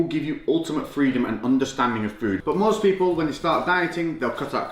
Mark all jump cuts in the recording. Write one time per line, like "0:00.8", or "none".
0:02.4

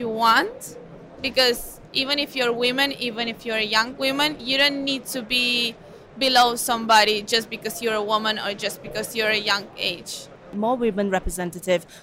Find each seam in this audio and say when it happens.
0:04.4
0:10.5

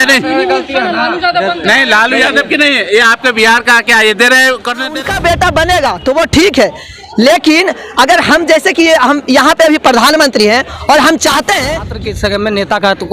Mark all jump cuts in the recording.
0:04.9
0:11.9

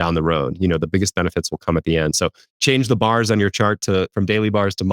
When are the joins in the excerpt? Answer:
0:02.4

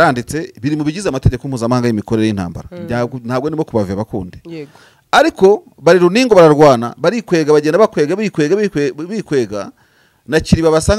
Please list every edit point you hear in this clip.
none

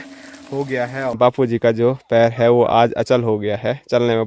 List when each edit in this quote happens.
0:01.1

